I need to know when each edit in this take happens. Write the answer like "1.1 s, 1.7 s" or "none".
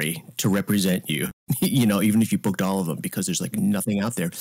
1.4 s

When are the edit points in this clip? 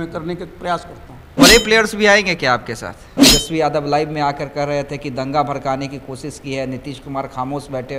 1.3 s, 3.2 s

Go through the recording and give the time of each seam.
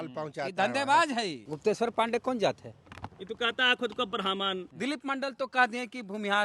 1.5 s, 4.7 s

